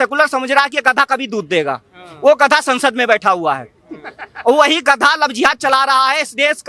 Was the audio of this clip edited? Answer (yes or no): no